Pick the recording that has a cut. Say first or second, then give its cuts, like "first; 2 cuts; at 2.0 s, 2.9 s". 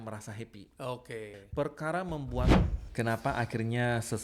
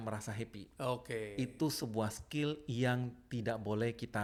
first; 2 cuts; at 1.3 s, 2.6 s